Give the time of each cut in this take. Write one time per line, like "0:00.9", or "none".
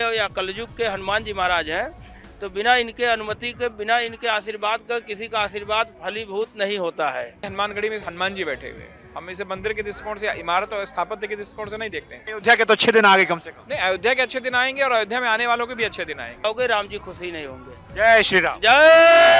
0:07.4
0:12.2
0:16.4